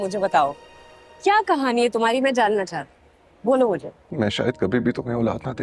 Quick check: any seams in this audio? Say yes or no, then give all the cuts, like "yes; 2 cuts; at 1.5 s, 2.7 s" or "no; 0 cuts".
no; 0 cuts